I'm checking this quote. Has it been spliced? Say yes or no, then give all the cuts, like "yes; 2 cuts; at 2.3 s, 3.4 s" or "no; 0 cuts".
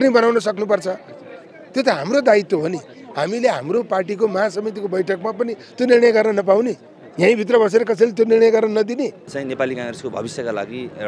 yes; 1 cut; at 9.3 s